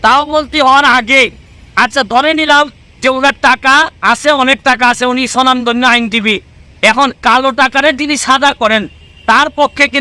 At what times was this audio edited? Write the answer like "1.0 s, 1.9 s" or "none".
none